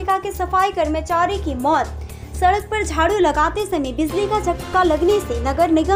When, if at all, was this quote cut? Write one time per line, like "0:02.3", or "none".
none